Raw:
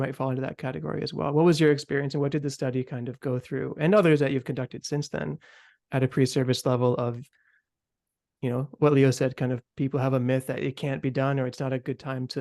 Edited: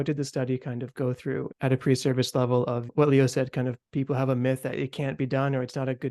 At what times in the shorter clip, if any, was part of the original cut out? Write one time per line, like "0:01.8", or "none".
0:01.5
0:02.9